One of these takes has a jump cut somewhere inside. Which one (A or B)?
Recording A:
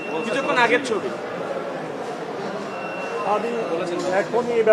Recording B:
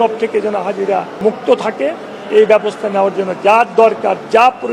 B